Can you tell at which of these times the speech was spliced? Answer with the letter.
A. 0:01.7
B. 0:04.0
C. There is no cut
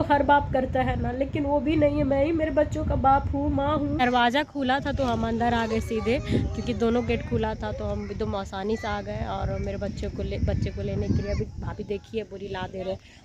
B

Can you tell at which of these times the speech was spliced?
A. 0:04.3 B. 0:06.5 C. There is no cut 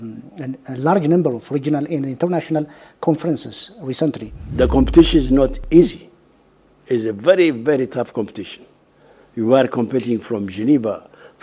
A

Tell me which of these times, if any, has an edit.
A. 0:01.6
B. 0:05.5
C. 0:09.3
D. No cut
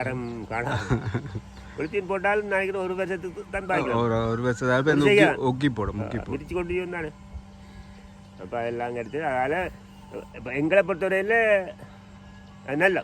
D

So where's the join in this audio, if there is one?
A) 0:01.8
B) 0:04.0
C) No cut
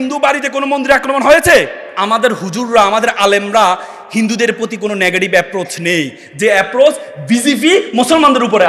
A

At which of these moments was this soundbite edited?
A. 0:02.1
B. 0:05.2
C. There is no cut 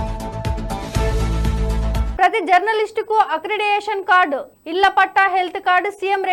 A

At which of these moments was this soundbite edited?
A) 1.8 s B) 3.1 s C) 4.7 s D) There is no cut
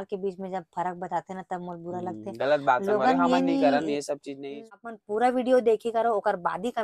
C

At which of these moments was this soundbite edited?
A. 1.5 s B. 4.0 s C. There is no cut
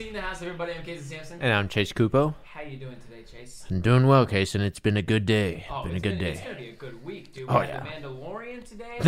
A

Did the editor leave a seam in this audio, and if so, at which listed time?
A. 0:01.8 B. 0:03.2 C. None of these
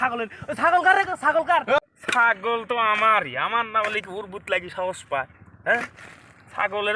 A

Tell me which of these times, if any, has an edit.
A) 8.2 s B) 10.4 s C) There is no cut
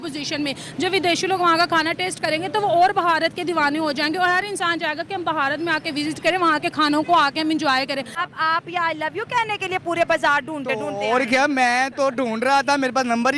A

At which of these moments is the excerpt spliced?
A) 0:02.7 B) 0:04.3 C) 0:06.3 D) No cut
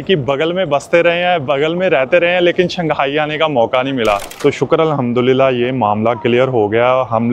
B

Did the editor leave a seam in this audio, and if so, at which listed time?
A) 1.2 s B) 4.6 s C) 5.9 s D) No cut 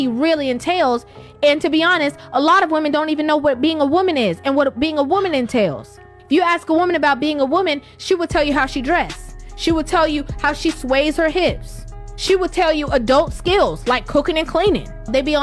B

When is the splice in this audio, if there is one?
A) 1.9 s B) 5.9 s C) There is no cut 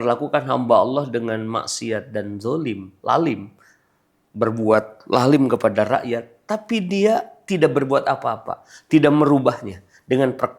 B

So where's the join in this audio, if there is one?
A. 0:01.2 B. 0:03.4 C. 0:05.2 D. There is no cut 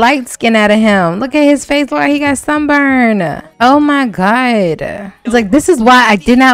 D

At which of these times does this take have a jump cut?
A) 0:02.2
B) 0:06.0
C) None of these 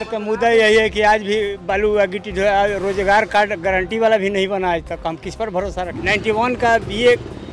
B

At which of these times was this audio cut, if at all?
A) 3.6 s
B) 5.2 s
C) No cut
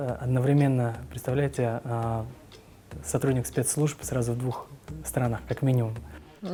C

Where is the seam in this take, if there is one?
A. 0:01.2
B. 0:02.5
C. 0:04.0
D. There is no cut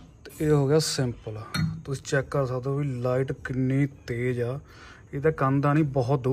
D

